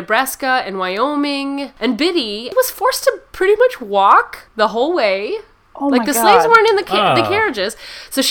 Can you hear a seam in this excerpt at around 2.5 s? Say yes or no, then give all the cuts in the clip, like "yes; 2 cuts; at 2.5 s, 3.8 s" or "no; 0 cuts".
yes; 3 cuts; at 1.7 s, 2.5 s, 4.4 s